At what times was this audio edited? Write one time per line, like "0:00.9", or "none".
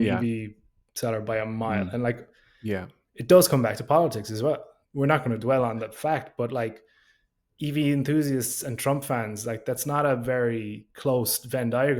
0:04.8